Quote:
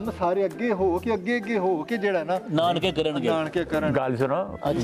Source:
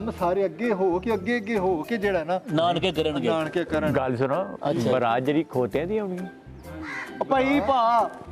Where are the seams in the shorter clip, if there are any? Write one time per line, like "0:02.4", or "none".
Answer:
none